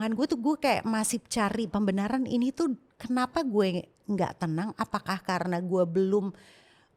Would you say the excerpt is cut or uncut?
uncut